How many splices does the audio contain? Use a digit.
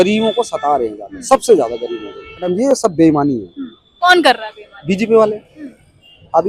1